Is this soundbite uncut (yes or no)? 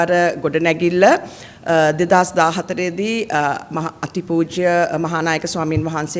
yes